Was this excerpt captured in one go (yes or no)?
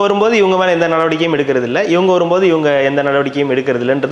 yes